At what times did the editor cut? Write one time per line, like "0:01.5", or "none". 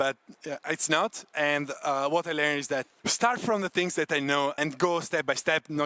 0:01.3
0:03.0
0:04.6